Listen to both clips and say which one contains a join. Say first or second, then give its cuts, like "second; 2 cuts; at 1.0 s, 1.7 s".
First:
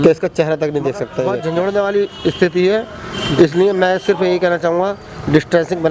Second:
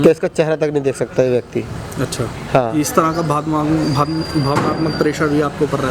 first; 1 cut; at 1.3 s